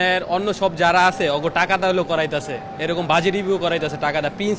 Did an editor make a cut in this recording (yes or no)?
no